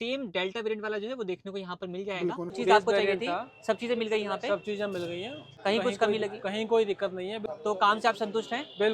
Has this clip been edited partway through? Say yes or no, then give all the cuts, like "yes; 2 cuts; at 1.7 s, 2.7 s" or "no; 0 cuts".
yes; 3 cuts; at 2.6 s, 5.4 s, 7.4 s